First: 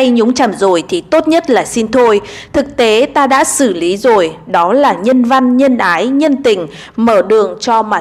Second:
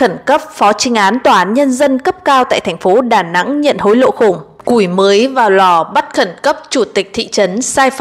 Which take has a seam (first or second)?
second